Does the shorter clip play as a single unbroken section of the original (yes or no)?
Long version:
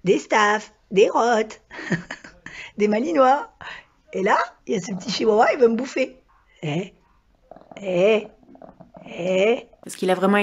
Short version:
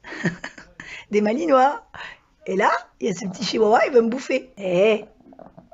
no